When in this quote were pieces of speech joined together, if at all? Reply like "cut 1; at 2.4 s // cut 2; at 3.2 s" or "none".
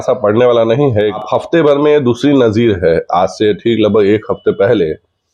cut 1; at 1.2 s